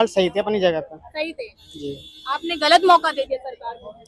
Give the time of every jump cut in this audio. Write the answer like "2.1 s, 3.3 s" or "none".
none